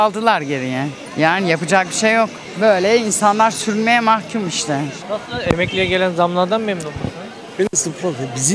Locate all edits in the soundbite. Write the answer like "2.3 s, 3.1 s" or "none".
5.0 s

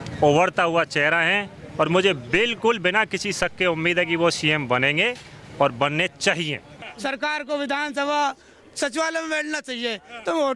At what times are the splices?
6.8 s

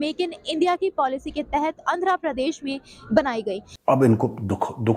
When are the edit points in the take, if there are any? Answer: 3.7 s

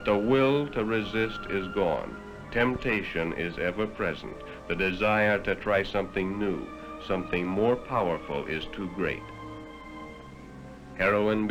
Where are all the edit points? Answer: none

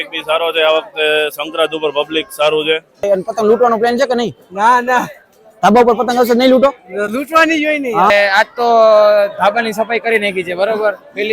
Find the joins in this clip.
3.0 s, 8.1 s

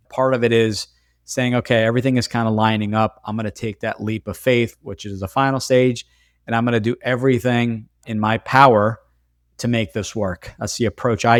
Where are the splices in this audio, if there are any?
none

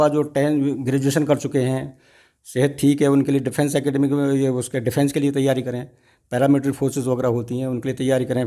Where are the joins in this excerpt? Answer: none

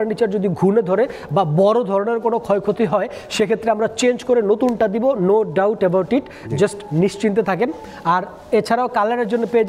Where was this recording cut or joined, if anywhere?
none

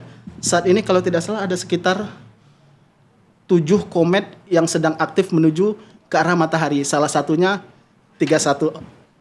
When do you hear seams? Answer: none

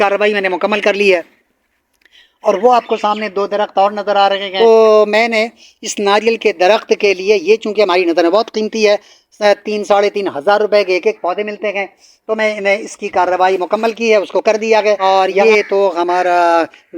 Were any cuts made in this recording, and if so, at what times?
4.5 s, 15.0 s

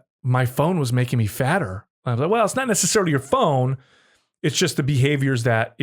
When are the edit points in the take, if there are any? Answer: none

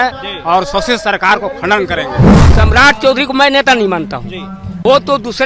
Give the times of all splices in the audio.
2.4 s

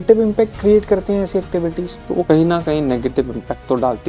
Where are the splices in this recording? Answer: 2.0 s

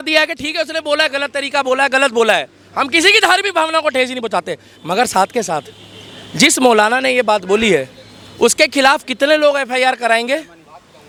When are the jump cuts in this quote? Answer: none

